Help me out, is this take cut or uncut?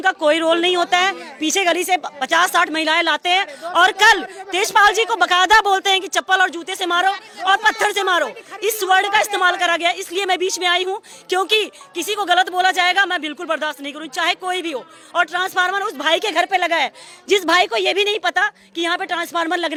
uncut